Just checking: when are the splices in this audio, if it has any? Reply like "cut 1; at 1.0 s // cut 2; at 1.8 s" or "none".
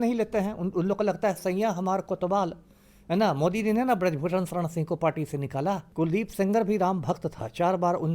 cut 1; at 5.9 s